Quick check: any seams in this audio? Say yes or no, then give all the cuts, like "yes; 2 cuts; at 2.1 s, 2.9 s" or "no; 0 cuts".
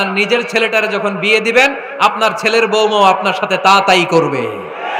no; 0 cuts